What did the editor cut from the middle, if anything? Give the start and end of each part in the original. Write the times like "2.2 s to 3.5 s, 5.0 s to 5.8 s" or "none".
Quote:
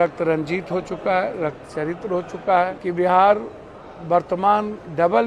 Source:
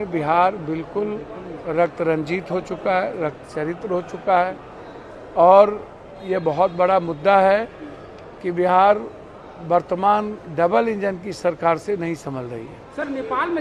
4.6 s to 8.4 s